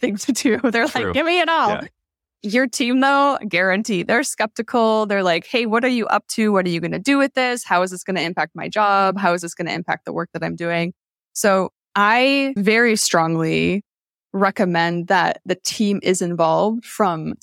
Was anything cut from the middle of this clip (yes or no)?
yes